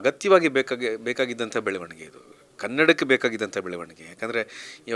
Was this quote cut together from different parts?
no; 0 cuts

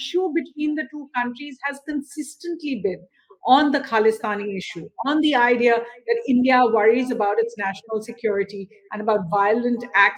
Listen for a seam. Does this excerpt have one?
no; 0 cuts

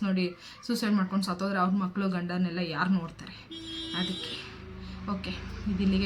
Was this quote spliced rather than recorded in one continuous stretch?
no; 0 cuts

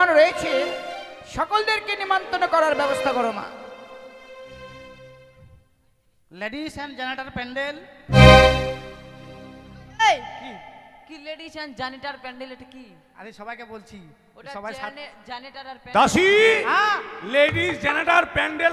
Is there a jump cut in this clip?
no; 0 cuts

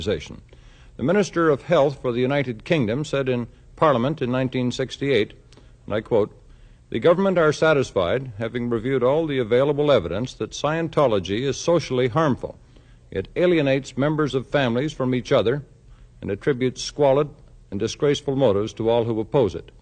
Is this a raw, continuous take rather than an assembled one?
yes; 0 cuts

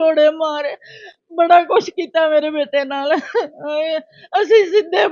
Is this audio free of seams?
yes; 0 cuts

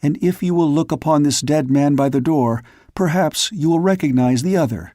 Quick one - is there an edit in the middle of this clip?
no; 0 cuts

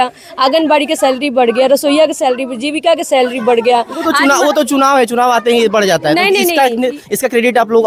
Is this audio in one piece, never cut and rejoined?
yes; 0 cuts

